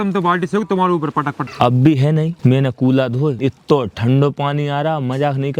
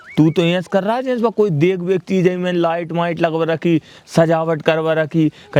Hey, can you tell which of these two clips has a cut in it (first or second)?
first